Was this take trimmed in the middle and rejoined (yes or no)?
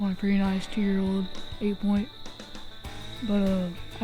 no